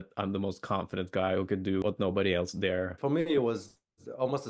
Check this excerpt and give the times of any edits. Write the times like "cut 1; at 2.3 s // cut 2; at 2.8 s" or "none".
cut 1; at 1.8 s // cut 2; at 2.9 s